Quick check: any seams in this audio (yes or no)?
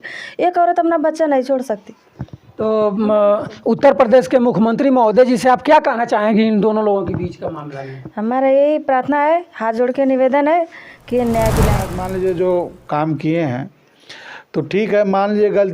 yes